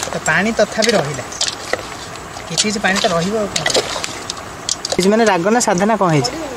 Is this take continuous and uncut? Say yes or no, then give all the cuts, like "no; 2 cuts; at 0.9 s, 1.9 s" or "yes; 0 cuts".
no; 1 cut; at 5.0 s